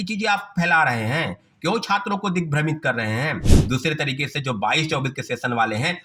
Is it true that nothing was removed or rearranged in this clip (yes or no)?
no